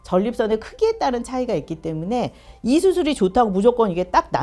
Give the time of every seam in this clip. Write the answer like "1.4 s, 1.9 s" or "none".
none